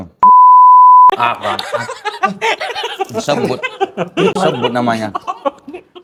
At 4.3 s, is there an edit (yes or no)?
no